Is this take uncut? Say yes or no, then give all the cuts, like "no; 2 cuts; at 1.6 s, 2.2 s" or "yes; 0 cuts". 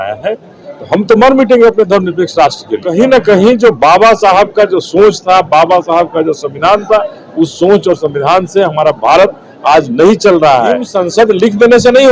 no; 2 cuts; at 2.8 s, 10.9 s